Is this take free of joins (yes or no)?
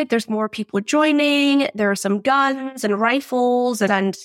yes